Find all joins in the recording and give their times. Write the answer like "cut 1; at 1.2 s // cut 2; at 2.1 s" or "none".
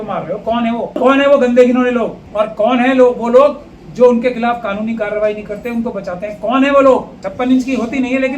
cut 1; at 2.2 s // cut 2; at 7.2 s